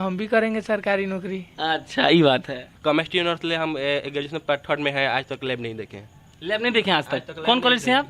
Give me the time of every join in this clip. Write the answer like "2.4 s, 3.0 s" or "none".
2.7 s